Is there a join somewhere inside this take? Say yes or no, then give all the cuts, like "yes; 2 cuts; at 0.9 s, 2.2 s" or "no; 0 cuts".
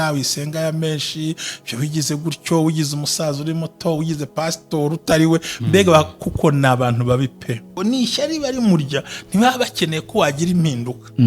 yes; 1 cut; at 7.7 s